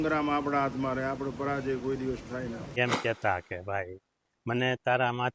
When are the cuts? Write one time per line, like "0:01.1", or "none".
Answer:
0:02.8